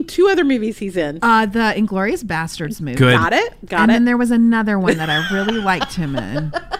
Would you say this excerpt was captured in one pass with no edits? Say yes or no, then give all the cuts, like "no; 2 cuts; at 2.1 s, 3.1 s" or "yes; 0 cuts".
yes; 0 cuts